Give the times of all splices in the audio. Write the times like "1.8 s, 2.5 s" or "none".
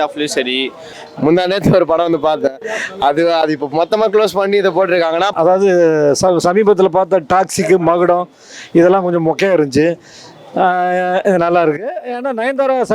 0.9 s, 5.3 s

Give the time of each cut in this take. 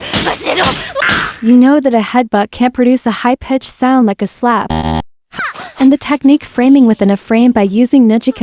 0.9 s, 5.2 s

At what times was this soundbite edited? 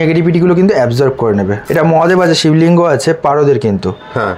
1.6 s

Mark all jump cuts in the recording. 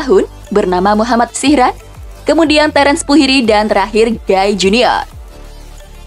5.1 s

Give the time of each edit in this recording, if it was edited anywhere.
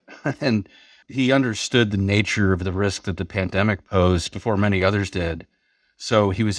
1.0 s, 3.8 s

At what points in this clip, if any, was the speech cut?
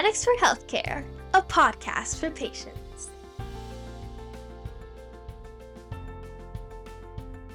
none

